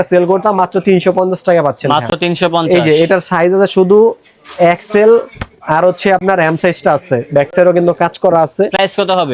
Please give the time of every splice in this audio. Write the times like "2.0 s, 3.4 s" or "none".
none